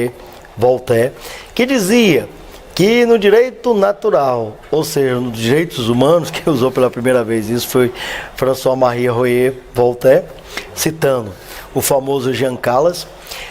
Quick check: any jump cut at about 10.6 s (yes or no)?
no